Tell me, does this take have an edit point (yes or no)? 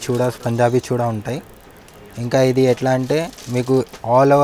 no